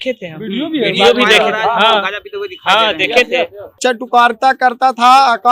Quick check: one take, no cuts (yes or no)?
no